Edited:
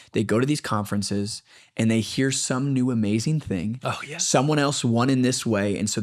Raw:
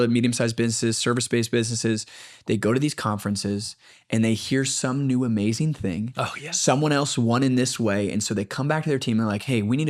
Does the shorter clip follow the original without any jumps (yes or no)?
yes